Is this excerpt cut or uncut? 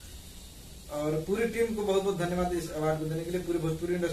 uncut